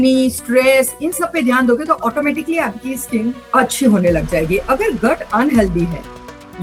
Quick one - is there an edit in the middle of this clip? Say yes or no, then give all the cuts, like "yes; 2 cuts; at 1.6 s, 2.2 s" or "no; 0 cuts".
no; 0 cuts